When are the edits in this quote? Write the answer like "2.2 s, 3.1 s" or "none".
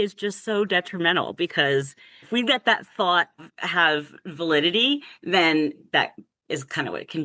2.3 s, 3.6 s, 5.8 s